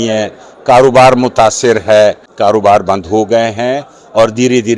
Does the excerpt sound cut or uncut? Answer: cut